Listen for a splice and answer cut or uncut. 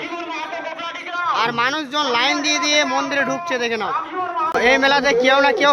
cut